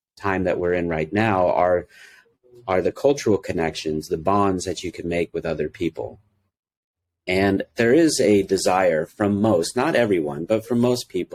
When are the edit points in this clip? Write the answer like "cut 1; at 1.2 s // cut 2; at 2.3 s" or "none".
none